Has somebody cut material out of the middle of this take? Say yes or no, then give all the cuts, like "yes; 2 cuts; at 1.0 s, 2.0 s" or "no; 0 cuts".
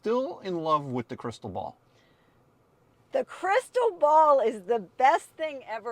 no; 0 cuts